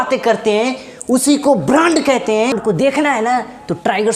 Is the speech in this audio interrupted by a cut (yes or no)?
yes